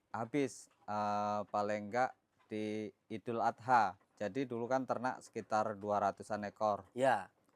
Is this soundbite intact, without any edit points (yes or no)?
no